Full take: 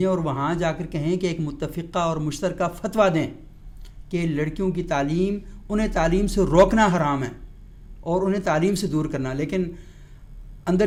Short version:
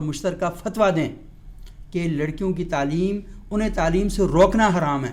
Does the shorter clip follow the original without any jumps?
yes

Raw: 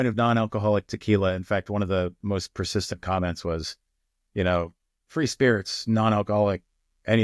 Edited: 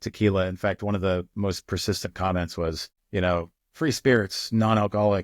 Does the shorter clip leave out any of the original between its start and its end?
yes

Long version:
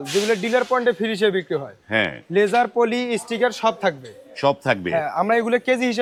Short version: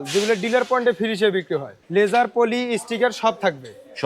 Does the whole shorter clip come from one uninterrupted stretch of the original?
no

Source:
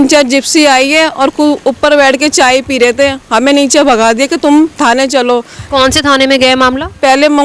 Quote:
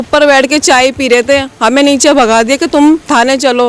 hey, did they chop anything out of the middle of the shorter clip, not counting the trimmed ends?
no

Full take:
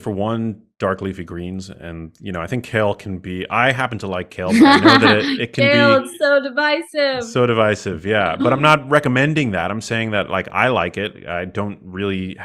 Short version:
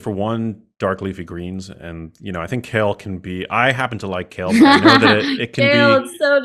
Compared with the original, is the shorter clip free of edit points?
yes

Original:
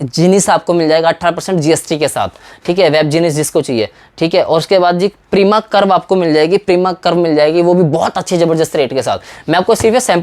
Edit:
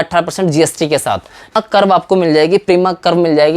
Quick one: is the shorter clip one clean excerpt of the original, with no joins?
no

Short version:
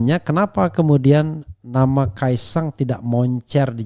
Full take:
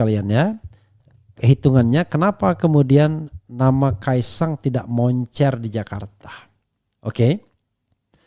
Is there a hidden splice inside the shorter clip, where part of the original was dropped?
no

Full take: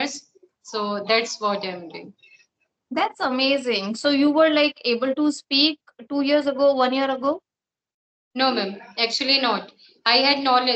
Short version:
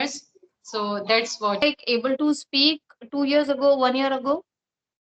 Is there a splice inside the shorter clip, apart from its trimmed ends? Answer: yes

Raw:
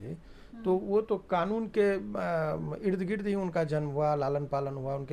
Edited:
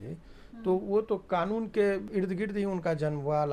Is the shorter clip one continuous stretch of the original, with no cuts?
no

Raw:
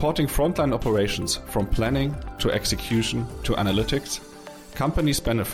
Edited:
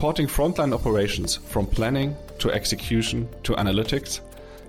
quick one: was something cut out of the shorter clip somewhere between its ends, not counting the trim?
no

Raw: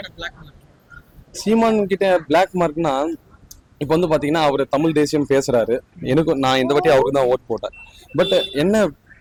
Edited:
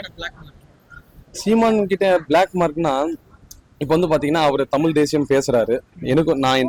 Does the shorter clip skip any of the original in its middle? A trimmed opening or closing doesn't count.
no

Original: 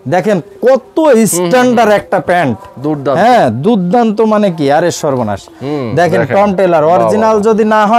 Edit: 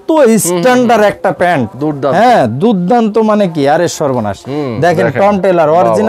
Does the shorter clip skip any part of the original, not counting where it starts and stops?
yes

